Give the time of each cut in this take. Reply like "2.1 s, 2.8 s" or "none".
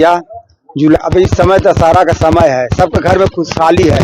1.0 s